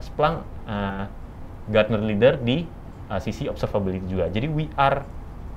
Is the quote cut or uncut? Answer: uncut